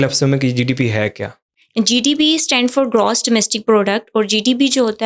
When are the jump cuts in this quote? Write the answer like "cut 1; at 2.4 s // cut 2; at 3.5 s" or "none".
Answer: none